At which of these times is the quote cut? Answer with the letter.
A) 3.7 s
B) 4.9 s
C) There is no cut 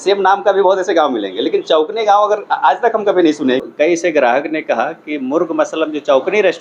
A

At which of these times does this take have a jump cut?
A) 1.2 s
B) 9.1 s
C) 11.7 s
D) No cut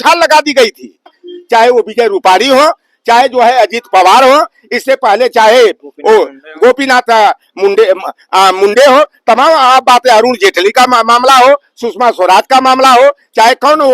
A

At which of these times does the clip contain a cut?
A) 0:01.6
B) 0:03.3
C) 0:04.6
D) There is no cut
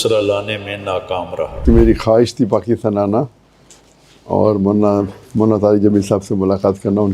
A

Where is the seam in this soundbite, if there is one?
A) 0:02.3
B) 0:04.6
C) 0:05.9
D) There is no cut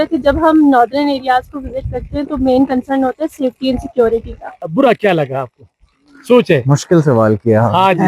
B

